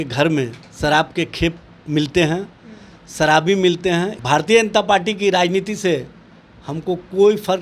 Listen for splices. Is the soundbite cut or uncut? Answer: cut